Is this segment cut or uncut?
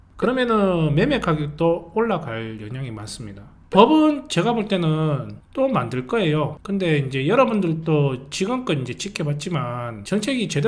uncut